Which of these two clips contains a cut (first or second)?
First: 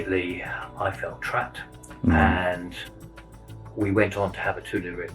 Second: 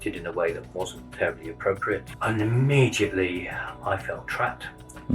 second